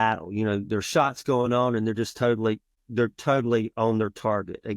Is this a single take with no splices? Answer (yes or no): no